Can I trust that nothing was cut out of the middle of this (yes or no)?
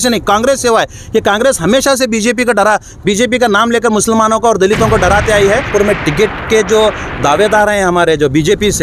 no